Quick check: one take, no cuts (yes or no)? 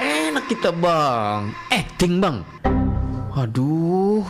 yes